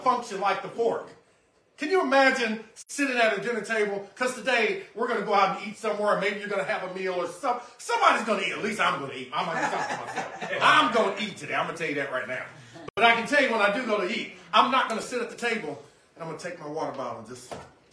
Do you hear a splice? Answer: no; 0 cuts

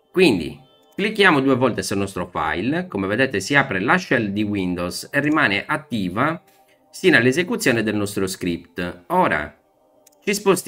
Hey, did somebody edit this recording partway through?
no; 0 cuts

